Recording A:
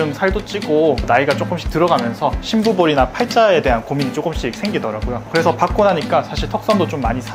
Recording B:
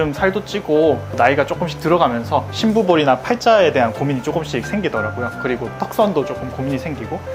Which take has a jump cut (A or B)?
A